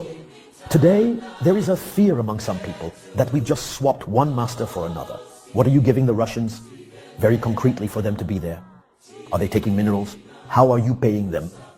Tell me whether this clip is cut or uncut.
cut